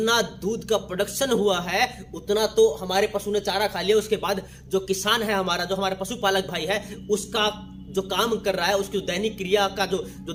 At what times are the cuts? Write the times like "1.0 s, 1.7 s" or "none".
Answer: none